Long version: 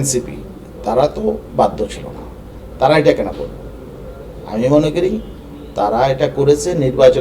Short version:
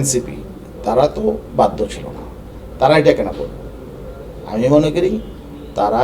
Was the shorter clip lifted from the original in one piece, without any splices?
yes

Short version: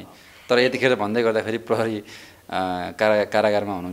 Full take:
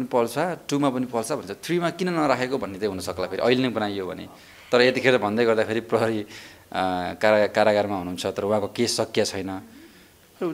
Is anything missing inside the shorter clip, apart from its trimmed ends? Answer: no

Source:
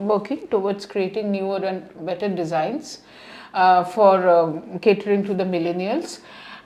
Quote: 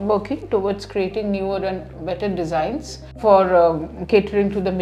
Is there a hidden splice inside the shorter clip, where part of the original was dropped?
yes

